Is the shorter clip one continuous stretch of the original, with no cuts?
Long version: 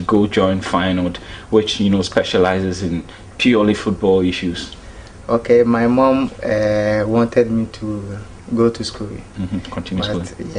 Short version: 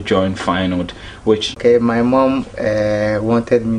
no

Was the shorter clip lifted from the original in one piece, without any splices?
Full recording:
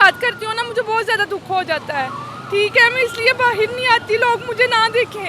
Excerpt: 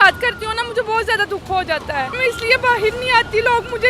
no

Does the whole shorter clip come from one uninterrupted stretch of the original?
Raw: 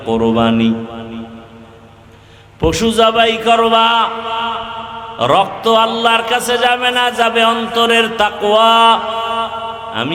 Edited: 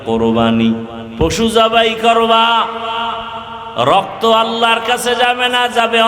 no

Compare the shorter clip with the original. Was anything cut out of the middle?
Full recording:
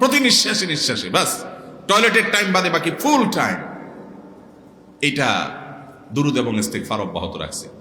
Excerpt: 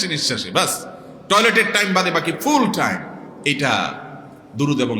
yes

